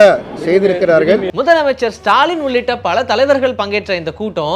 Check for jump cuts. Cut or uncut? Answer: cut